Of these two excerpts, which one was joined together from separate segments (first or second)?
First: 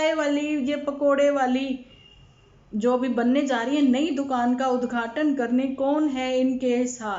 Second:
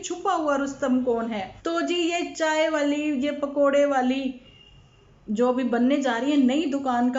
second